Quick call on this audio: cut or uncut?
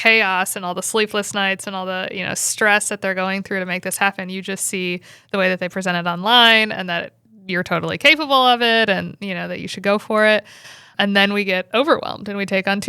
cut